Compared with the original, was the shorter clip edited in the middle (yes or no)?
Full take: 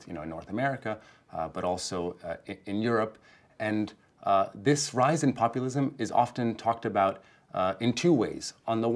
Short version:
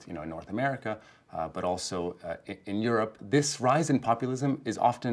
yes